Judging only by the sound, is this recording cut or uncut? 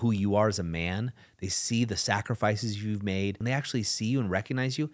cut